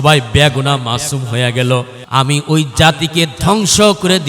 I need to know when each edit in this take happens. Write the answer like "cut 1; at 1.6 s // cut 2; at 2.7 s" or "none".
cut 1; at 2.0 s